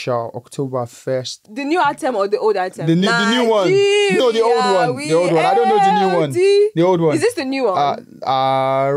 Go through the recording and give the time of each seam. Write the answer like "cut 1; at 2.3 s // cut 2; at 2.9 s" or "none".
cut 1; at 1.4 s